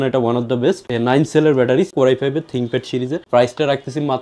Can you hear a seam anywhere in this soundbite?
yes; 2 cuts; at 1.9 s, 3.2 s

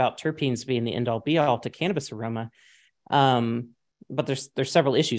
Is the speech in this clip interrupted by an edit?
no; 0 cuts

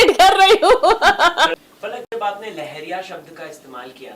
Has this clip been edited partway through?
yes; 1 cut; at 1.5 s

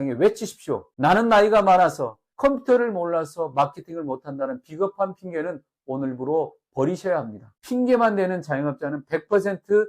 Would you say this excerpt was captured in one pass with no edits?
no; 1 cut; at 7.5 s

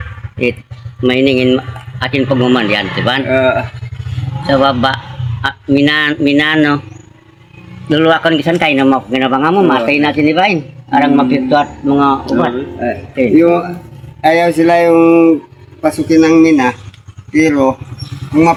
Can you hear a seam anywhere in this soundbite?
no; 0 cuts

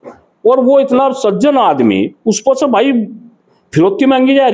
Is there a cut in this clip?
no; 0 cuts

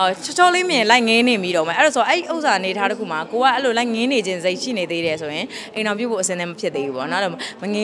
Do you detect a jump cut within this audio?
no; 0 cuts

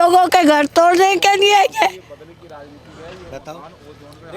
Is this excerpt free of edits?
yes; 0 cuts

